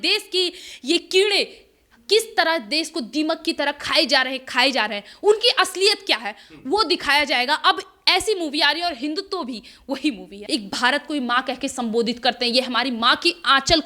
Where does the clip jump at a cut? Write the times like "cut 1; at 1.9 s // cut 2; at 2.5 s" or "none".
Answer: cut 1; at 10.4 s